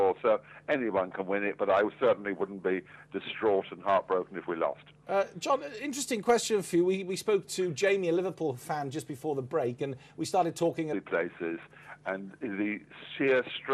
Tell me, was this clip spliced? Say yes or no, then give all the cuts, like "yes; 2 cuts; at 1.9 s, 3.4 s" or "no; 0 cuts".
no; 0 cuts